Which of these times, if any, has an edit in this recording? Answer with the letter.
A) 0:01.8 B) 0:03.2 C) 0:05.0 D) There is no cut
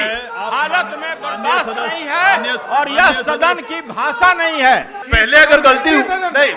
C